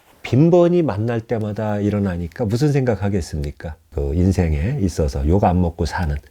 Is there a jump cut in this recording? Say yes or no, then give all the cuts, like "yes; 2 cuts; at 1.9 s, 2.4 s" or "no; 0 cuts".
yes; 1 cut; at 3.9 s